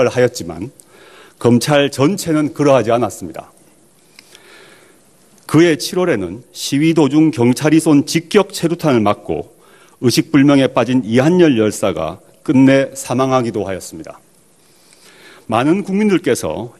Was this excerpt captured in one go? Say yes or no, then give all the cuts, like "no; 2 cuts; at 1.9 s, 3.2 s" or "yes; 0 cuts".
yes; 0 cuts